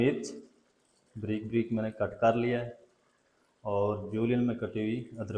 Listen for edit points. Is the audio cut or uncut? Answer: uncut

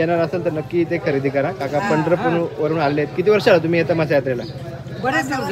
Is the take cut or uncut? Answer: uncut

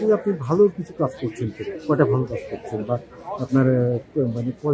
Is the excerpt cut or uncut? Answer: uncut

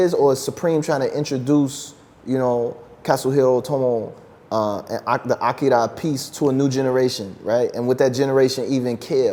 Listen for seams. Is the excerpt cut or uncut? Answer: uncut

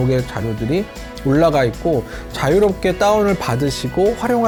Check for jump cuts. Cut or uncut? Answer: uncut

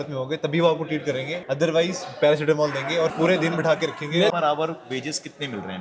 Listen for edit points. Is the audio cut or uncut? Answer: cut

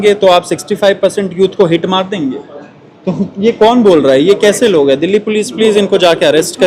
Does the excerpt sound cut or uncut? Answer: uncut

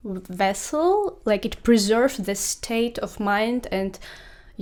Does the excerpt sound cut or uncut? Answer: uncut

